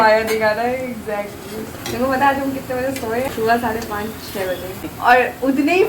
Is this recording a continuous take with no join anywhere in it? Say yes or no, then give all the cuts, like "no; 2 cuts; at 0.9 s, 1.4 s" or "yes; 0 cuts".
no; 3 cuts; at 1.8 s, 3.3 s, 4.9 s